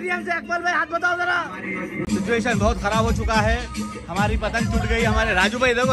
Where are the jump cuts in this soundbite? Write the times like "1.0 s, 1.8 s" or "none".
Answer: 2.0 s